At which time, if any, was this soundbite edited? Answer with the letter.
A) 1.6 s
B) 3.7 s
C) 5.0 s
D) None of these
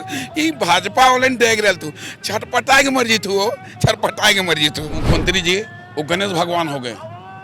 C